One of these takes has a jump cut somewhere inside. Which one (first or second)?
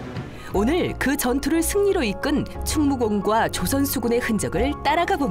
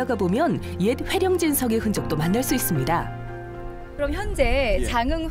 first